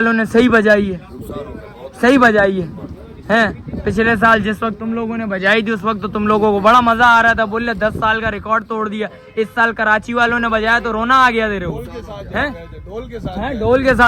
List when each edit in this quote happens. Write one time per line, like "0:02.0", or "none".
none